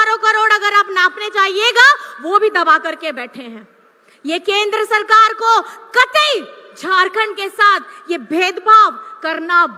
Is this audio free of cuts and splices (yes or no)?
yes